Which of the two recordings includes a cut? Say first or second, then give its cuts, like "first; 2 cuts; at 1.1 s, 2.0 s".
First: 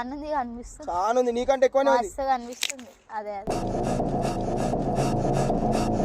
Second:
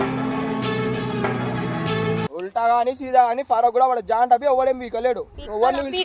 second; 1 cut; at 2.3 s